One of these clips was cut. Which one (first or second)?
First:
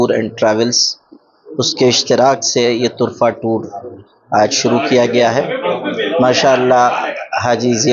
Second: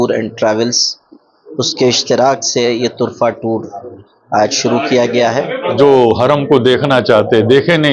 second